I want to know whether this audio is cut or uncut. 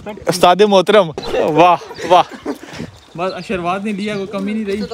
cut